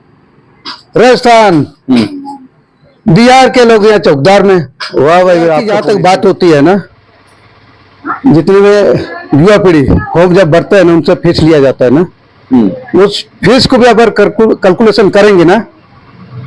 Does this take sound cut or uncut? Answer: cut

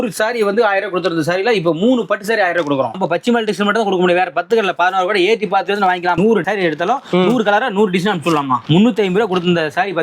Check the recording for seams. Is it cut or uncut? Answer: cut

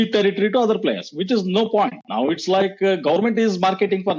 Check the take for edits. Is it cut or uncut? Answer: uncut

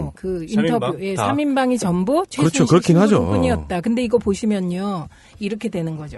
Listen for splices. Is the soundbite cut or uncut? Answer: cut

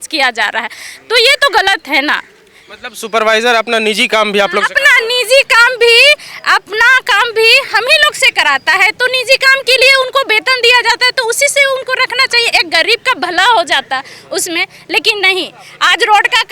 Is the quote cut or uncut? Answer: uncut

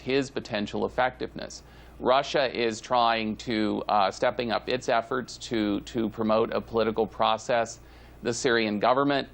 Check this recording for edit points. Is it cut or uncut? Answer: cut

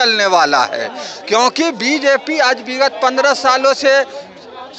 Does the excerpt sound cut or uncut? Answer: uncut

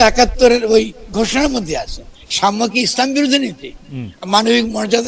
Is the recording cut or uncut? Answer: uncut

